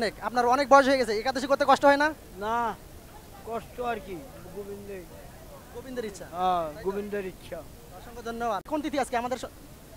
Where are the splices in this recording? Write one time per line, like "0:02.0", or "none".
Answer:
0:08.7